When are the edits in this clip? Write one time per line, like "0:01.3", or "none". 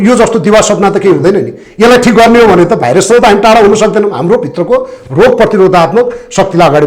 none